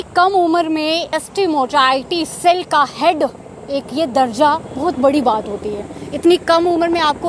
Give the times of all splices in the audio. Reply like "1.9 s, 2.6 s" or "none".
1.1 s